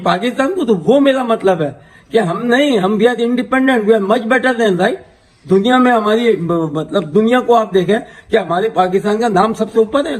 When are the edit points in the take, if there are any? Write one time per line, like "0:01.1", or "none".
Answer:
none